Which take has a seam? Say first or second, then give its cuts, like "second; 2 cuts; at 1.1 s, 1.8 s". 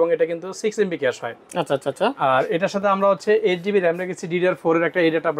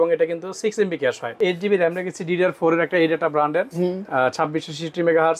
second; 1 cut; at 1.4 s